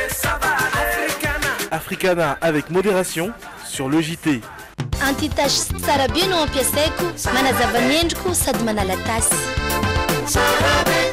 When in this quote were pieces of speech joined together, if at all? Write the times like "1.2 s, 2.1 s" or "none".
4.6 s